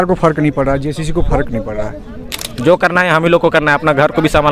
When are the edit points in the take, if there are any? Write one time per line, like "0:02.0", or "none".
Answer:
0:02.4